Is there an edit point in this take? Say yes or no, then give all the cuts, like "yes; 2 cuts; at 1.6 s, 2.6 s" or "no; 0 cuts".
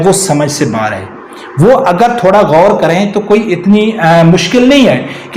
no; 0 cuts